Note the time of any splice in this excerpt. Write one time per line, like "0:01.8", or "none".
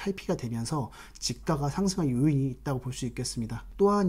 none